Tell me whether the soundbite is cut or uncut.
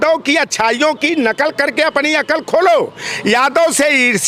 uncut